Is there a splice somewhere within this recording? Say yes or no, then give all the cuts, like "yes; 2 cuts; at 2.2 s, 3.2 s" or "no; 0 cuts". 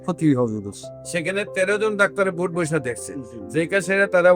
no; 0 cuts